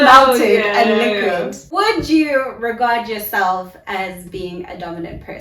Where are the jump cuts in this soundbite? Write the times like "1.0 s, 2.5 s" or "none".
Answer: 1.7 s